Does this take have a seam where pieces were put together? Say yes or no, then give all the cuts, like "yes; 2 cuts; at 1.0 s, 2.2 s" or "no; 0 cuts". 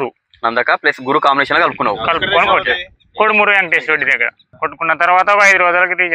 yes; 1 cut; at 4.4 s